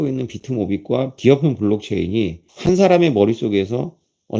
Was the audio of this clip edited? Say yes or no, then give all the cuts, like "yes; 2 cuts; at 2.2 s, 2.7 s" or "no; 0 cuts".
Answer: yes; 2 cuts; at 1.1 s, 2.5 s